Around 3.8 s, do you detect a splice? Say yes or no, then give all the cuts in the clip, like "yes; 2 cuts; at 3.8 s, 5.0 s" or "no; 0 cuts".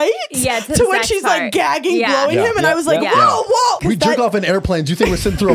yes; 1 cut; at 3.8 s